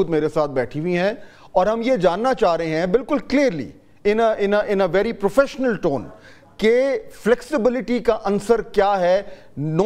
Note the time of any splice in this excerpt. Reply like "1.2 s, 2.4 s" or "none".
none